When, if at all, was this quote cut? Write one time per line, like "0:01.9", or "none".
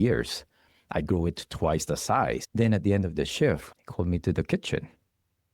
0:02.5
0:03.7